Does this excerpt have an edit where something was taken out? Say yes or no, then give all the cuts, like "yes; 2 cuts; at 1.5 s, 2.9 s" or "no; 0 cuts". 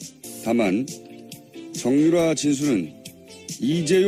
no; 0 cuts